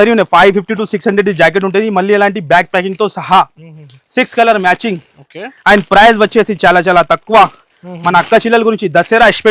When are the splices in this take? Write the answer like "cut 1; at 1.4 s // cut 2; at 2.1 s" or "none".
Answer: none